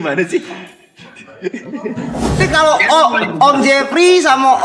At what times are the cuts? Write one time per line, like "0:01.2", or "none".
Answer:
0:02.4